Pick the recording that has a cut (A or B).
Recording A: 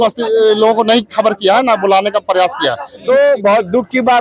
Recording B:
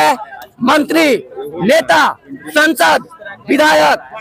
A